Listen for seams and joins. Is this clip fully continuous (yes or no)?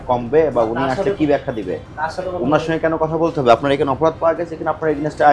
yes